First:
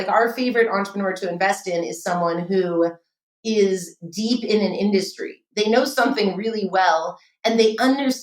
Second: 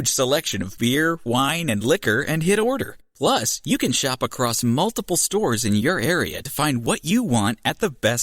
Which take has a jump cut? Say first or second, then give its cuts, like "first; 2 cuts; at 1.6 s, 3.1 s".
first; 1 cut; at 5.4 s